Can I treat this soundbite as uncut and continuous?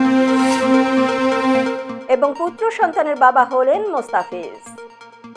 no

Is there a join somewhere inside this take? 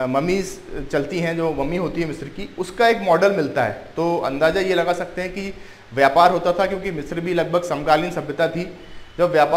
no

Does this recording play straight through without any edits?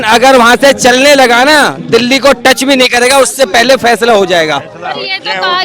yes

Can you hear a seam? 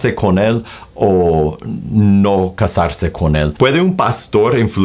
yes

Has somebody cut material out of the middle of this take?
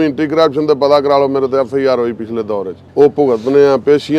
yes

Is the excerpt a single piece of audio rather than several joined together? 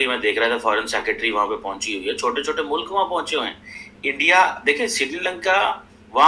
yes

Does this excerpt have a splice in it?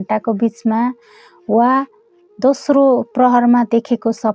no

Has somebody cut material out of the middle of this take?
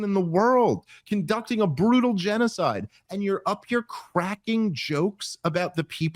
no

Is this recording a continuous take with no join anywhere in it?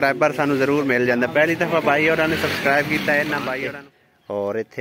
no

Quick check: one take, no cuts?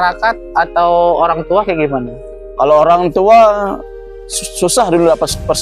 yes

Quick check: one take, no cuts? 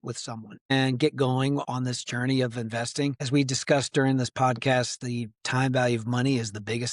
no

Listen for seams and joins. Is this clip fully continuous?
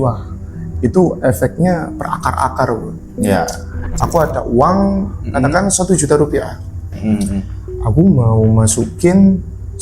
no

